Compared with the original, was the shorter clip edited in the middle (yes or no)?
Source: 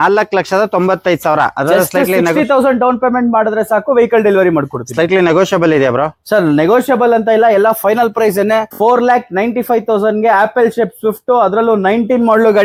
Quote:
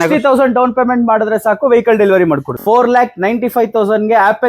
yes